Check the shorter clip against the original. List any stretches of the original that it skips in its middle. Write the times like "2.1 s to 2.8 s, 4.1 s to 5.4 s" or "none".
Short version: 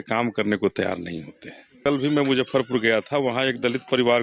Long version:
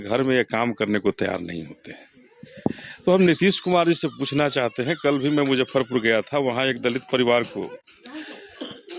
2.2 s to 5.0 s